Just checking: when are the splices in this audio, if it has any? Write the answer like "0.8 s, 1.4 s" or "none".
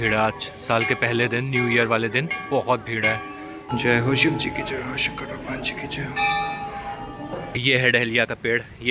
3.7 s, 7.6 s